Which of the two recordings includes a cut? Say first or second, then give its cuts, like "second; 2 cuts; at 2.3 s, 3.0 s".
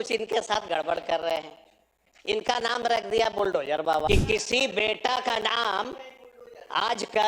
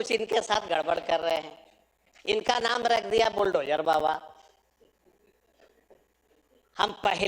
first; 1 cut; at 4.1 s